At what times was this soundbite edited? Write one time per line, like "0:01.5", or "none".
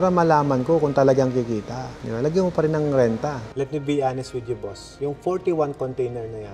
0:03.4